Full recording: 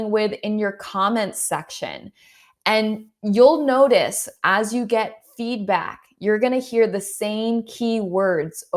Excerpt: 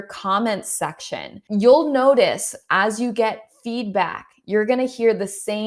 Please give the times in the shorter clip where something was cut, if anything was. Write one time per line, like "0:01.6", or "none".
0:01.4